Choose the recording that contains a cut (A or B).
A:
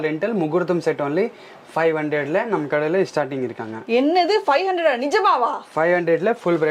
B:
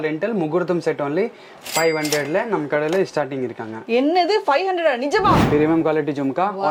B